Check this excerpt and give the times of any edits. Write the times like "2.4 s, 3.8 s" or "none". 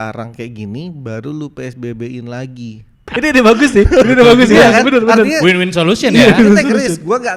3.0 s